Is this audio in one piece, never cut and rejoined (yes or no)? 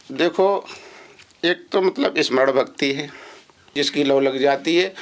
no